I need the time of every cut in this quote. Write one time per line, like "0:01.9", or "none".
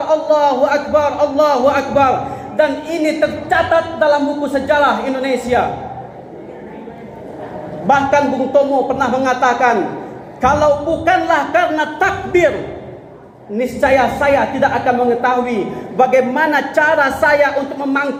none